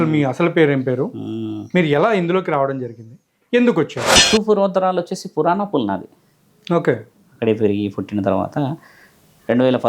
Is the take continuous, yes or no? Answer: no